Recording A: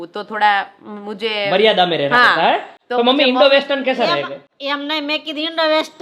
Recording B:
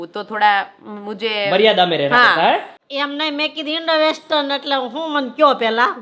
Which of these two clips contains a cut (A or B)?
B